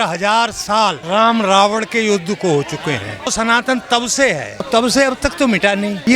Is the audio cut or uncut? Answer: cut